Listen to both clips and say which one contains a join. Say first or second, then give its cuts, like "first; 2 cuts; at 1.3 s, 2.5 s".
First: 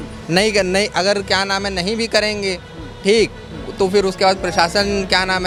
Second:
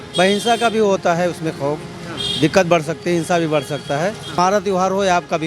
second; 1 cut; at 4.4 s